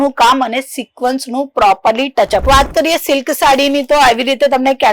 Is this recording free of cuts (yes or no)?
no